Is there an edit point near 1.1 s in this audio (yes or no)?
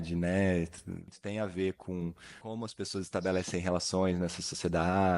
yes